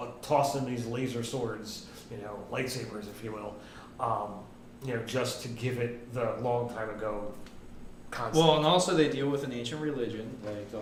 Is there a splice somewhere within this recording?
no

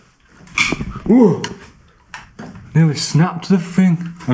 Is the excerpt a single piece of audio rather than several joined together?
yes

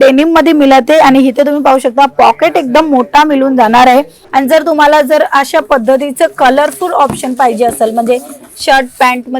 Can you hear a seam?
yes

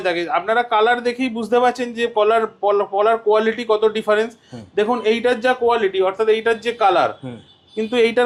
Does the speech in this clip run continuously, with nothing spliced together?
yes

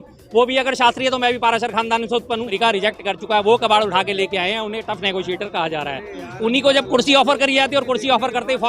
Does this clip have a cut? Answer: yes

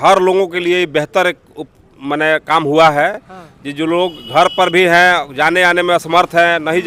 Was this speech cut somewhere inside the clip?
no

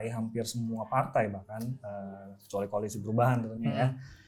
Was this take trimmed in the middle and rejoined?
no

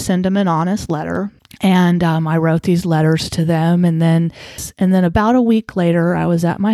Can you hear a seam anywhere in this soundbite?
yes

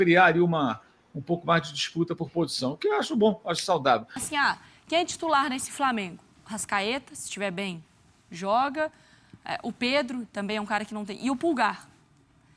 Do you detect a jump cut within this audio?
yes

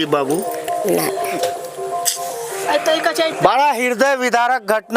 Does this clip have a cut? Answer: no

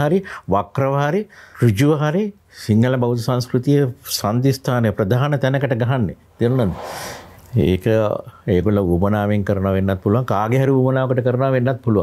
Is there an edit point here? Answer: no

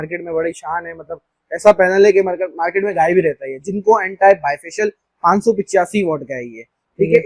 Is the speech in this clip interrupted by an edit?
no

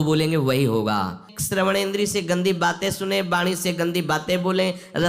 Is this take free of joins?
no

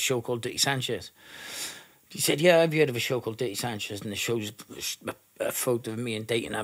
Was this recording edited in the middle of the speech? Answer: no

